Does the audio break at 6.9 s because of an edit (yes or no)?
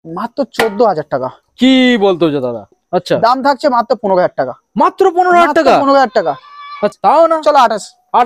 yes